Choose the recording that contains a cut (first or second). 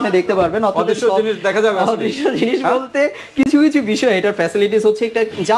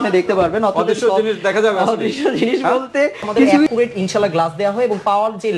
second